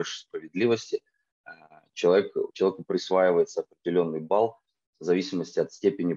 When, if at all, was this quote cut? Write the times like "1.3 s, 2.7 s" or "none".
none